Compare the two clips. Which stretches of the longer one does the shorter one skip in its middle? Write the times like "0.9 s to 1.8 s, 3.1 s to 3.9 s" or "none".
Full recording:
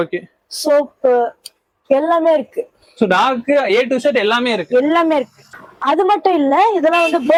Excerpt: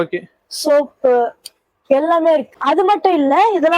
2.5 s to 5.7 s

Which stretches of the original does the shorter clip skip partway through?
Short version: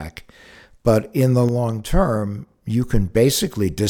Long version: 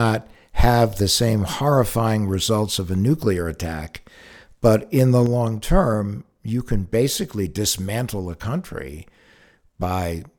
none

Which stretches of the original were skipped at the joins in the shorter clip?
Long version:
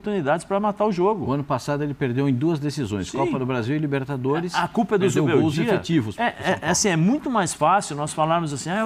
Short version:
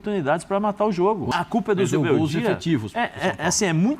1.3 s to 4.5 s

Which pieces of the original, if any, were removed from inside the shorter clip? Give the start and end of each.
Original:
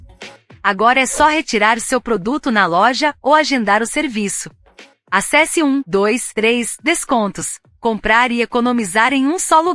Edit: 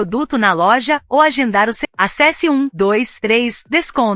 3.9 s to 4.9 s

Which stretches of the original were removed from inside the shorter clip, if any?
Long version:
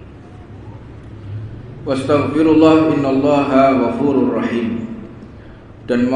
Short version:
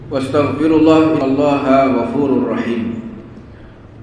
3.0 s to 3.1 s

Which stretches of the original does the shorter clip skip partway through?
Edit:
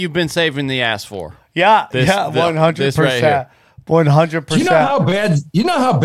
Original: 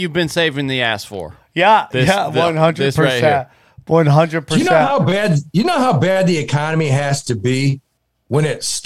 none

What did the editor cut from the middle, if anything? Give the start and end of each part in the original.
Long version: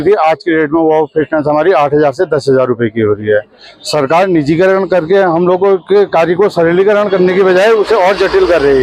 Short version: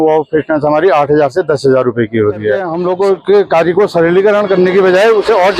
3.5 s to 5.3 s

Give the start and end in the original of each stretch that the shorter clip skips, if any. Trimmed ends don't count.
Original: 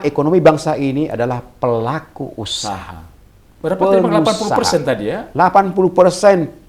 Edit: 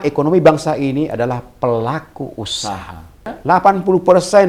3.3 s to 5.2 s

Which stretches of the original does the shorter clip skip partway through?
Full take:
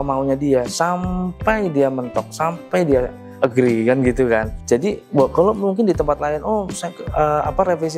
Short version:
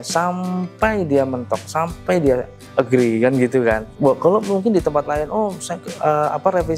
4.5 s to 5.0 s

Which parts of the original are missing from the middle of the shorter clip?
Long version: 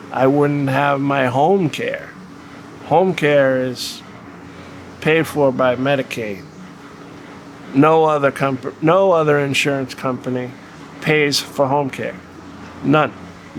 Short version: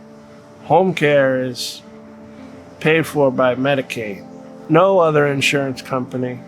6.7 s to 8.7 s

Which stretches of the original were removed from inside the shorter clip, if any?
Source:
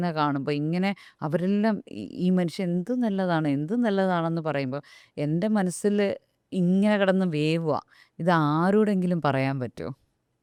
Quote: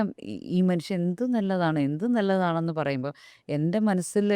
none

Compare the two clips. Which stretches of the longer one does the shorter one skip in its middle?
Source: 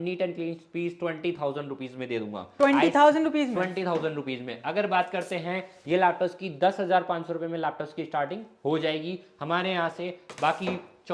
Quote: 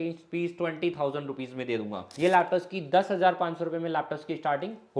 2.4 s to 5.7 s

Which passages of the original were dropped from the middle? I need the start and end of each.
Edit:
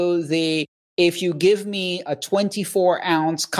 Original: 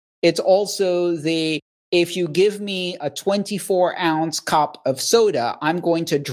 none

